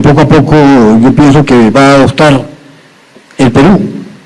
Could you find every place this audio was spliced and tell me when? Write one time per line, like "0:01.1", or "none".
none

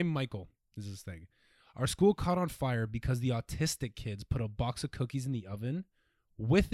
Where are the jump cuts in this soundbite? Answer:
none

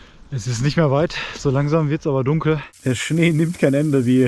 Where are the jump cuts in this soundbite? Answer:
0:02.7

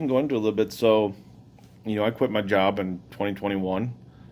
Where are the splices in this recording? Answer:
none

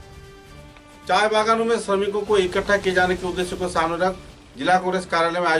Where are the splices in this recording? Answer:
none

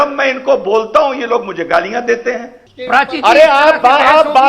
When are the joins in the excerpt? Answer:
0:02.5

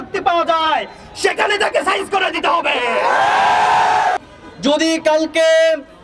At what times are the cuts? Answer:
0:04.2

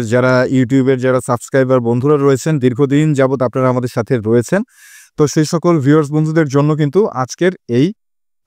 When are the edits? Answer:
none

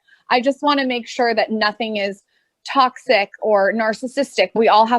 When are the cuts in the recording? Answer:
none

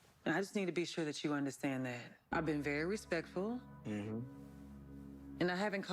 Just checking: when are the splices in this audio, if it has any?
0:02.2

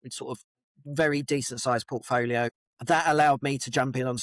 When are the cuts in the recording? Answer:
0:02.5

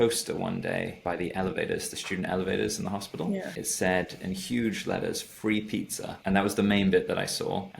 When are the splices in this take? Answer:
0:01.0
0:03.6

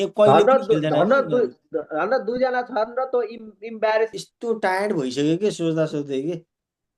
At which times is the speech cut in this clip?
0:04.1

